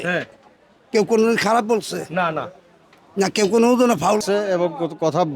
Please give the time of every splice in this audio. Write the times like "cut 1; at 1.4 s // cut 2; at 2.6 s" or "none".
cut 1; at 4.2 s